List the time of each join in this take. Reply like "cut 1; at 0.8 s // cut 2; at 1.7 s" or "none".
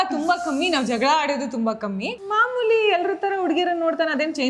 cut 1; at 2.1 s